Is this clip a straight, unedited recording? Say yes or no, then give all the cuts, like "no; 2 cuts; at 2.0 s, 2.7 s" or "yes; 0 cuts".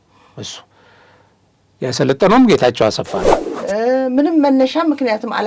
no; 1 cut; at 3.2 s